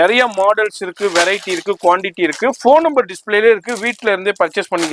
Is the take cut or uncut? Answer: uncut